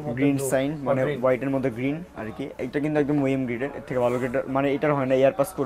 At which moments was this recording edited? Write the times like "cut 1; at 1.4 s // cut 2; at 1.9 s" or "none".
none